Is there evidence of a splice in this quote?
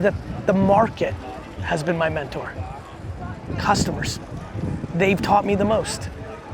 no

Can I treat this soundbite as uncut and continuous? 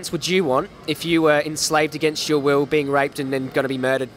yes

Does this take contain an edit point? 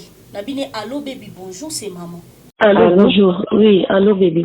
yes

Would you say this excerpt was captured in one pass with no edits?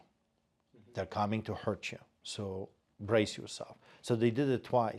yes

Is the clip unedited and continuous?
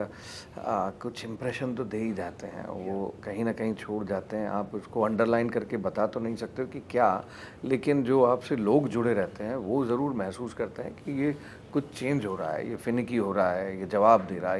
yes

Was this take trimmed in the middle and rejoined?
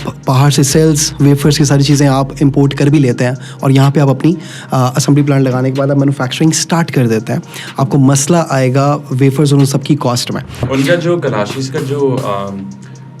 yes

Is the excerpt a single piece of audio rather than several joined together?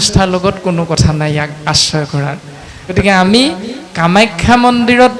no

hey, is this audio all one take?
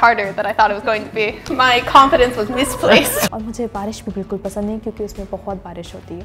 no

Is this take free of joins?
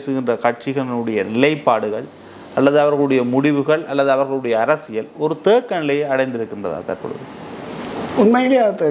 yes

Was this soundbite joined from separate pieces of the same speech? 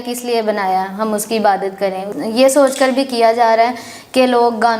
yes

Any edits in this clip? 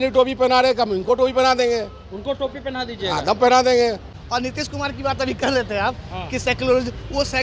yes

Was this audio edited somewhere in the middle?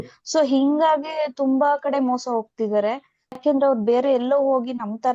yes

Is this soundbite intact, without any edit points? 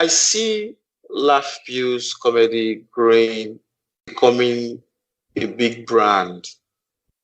yes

